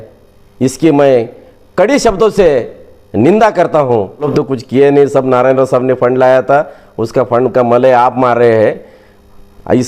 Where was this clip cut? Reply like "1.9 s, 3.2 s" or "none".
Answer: 4.3 s